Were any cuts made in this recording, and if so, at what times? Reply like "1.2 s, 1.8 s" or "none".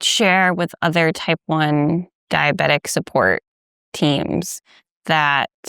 2.1 s

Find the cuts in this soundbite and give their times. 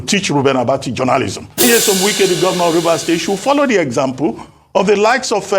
1.6 s

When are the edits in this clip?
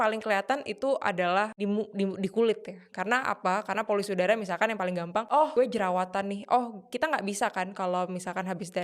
1.5 s, 5.4 s

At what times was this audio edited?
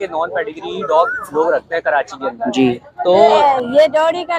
3.2 s

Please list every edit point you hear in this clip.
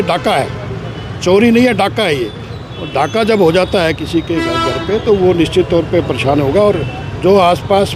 none

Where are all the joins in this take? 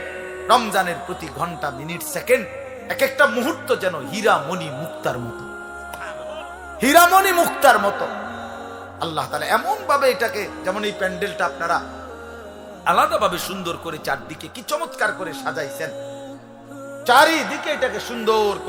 none

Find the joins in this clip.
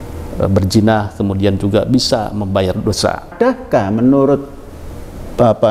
3.3 s

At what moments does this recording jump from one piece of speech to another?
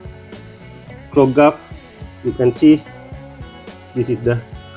1.1 s

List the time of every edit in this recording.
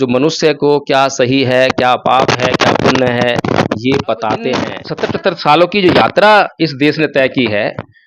4.8 s

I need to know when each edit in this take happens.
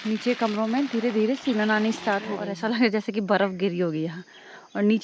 2.4 s

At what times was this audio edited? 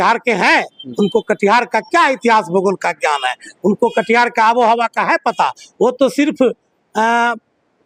none

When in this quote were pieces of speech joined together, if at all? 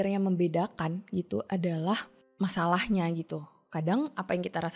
2.2 s

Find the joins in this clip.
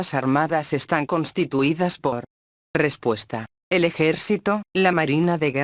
2.0 s, 3.7 s

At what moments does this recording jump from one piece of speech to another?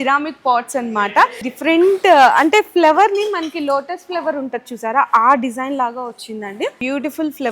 1.5 s, 6.8 s

